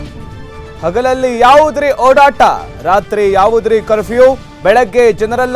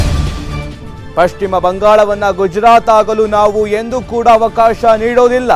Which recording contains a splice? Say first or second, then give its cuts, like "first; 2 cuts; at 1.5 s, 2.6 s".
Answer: second; 1 cut; at 1.0 s